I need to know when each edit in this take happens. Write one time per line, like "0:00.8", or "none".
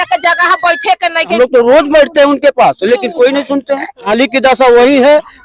0:01.3
0:04.1